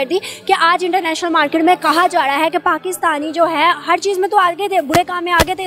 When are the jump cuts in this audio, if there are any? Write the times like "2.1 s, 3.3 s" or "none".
none